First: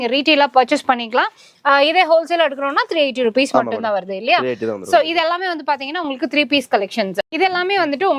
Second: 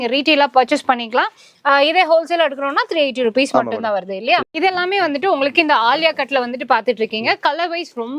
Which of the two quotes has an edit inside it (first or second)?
second